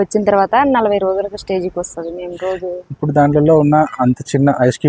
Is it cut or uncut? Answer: uncut